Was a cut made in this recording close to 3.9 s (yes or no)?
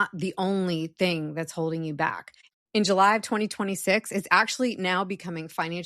no